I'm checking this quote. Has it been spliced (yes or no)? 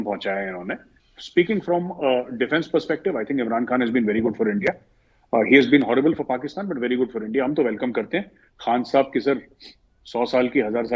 yes